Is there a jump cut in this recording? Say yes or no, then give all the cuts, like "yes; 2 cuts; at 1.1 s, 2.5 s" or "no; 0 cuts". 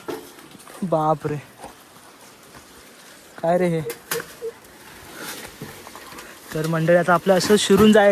no; 0 cuts